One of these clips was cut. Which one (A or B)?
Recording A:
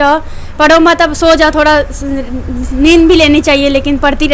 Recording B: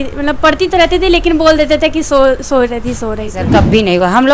B